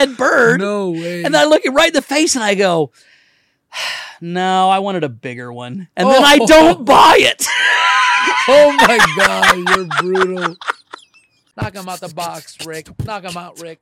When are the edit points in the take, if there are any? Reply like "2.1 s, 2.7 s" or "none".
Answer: 11.4 s